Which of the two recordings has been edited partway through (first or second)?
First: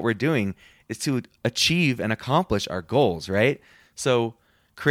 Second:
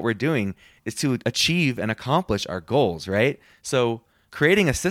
second